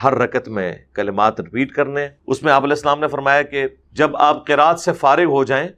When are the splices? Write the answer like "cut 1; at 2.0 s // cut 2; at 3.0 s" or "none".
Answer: cut 1; at 2.2 s // cut 2; at 3.8 s